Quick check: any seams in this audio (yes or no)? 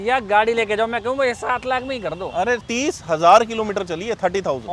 yes